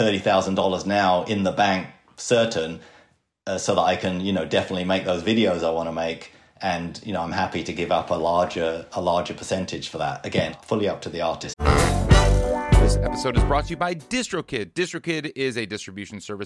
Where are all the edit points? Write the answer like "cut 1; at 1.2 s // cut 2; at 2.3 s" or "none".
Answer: cut 1; at 11.5 s